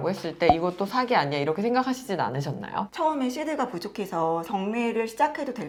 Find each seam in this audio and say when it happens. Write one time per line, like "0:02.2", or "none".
none